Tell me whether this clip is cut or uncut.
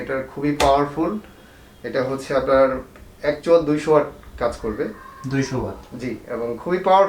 uncut